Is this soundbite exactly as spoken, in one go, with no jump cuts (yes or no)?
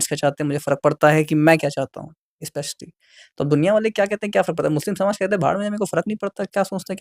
yes